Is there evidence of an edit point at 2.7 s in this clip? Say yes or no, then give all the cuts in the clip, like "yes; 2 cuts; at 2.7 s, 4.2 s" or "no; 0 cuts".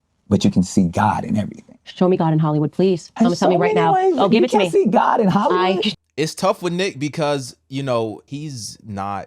no; 2 cuts; at 5.9 s, 8.2 s